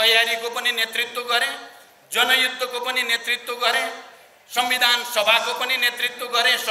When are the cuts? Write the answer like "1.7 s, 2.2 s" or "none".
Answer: none